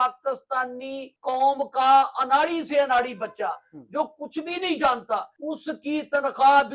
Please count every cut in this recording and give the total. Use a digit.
2